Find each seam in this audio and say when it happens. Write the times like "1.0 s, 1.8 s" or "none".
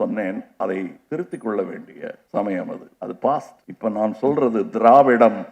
1.0 s, 2.2 s, 2.9 s, 3.6 s